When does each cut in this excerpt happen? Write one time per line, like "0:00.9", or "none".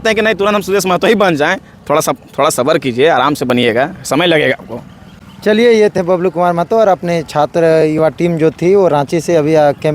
none